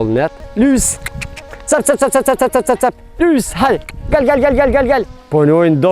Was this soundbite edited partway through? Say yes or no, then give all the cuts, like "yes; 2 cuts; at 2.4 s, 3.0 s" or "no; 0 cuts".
no; 0 cuts